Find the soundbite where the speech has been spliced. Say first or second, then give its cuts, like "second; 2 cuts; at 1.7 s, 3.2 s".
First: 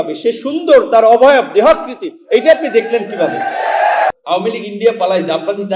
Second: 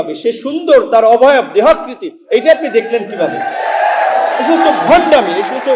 first; 1 cut; at 4.1 s